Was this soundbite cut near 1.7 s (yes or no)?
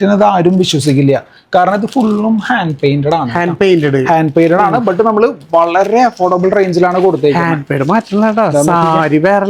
no